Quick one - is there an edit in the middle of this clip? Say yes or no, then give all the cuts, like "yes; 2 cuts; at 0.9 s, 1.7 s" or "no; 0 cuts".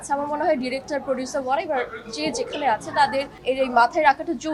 no; 0 cuts